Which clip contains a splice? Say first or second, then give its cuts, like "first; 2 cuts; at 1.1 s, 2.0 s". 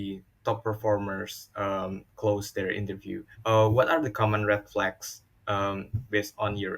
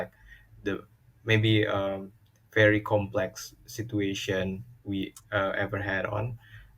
first; 1 cut; at 3.3 s